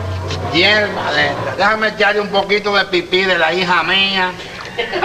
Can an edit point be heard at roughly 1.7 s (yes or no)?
yes